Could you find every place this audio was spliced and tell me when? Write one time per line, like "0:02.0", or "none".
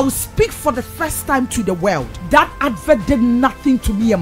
0:02.1